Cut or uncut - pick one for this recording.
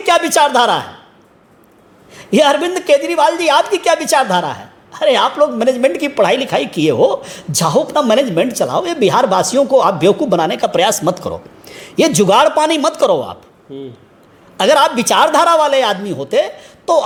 uncut